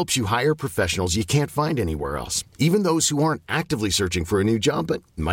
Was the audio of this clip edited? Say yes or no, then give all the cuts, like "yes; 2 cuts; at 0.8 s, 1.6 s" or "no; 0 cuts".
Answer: no; 0 cuts